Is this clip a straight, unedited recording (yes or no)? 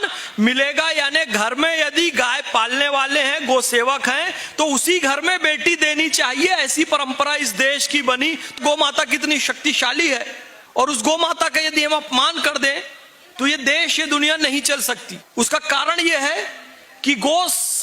no